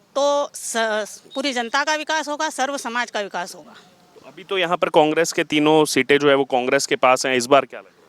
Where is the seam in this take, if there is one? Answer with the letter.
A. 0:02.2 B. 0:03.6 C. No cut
C